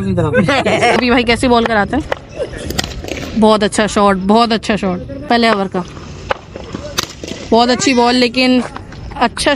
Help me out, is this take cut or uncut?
cut